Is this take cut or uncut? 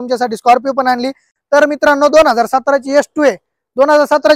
uncut